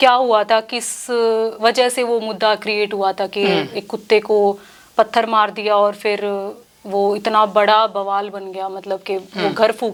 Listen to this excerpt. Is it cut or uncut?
uncut